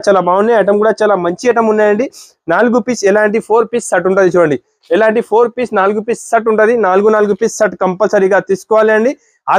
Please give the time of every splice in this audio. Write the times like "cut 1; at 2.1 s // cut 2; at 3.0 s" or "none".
none